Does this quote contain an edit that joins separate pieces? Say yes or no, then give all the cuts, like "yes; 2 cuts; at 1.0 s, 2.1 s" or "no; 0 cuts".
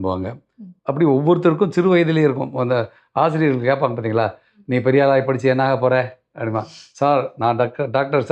no; 0 cuts